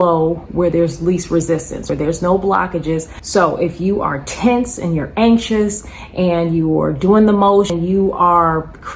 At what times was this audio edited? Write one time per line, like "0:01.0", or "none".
0:01.8
0:03.1
0:07.7